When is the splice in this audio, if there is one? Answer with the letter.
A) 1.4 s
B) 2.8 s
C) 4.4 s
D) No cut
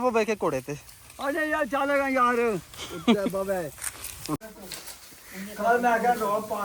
C